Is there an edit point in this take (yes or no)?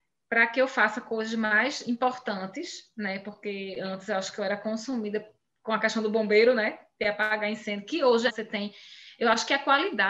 no